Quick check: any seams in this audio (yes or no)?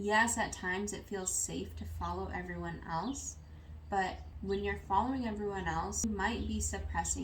yes